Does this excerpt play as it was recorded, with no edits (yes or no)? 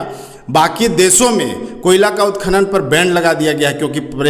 yes